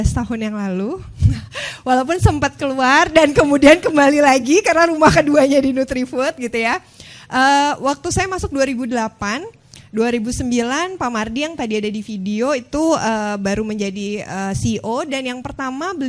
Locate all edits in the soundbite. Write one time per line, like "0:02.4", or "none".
none